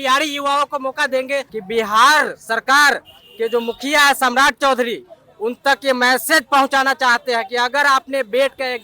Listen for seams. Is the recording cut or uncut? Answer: cut